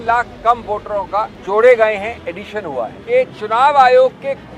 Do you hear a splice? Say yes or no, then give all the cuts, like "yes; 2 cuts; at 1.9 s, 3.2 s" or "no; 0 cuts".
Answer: yes; 2 cuts; at 1.4 s, 2.9 s